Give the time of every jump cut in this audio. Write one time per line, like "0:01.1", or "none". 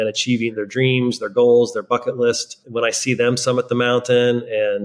0:02.6